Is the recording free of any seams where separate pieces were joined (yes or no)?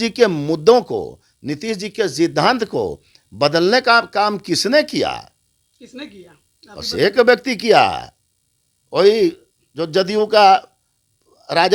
yes